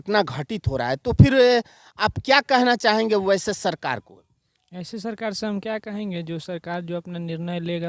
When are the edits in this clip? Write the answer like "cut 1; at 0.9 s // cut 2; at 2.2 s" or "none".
none